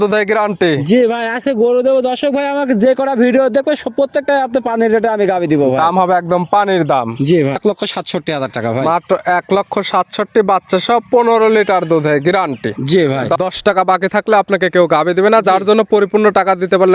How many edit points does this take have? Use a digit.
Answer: 2